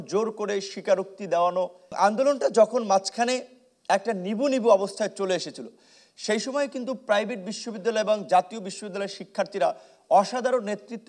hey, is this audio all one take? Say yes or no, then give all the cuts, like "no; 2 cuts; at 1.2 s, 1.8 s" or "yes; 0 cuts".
no; 1 cut; at 2.0 s